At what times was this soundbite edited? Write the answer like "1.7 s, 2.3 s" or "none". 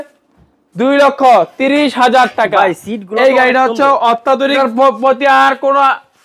4.6 s